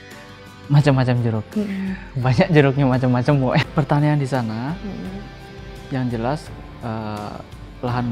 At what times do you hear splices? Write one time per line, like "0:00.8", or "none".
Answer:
0:03.7